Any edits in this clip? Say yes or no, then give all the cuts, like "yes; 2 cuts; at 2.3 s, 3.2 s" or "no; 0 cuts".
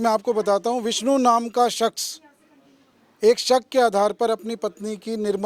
no; 0 cuts